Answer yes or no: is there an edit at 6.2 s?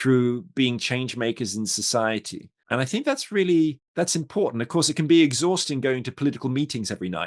no